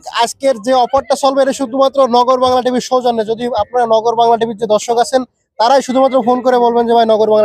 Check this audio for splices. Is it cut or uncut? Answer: uncut